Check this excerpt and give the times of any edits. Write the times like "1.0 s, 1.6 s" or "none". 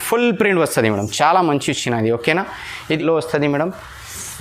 2.9 s